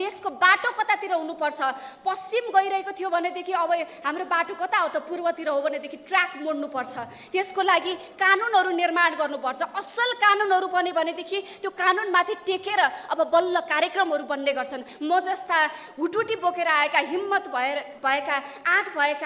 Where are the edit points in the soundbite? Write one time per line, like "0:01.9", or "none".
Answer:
0:14.9